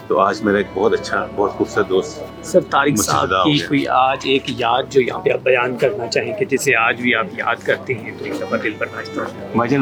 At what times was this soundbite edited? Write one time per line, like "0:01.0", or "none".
none